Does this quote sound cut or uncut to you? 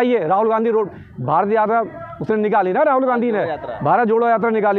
uncut